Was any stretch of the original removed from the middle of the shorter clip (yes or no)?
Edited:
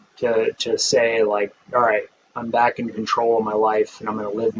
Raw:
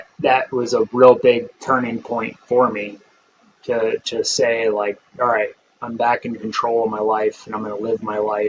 no